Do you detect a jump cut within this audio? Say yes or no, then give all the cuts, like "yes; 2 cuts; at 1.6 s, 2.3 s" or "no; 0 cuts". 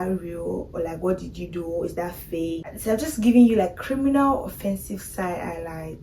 no; 0 cuts